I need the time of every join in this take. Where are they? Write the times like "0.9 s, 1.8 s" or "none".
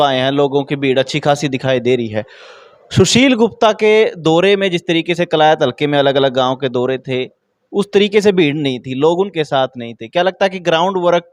none

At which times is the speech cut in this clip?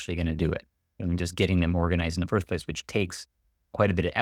none

